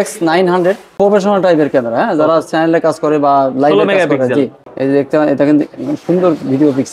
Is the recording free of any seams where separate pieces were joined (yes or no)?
no